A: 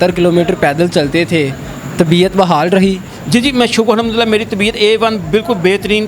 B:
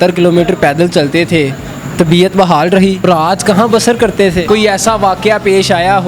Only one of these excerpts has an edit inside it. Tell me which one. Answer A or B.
B